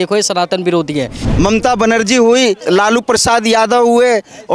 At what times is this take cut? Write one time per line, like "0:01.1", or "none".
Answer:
0:01.2
0:02.6